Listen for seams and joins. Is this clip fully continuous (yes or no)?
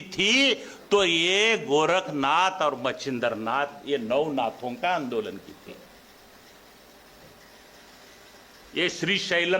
yes